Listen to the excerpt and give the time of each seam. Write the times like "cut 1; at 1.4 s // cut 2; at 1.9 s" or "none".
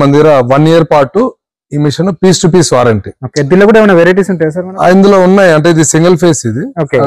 none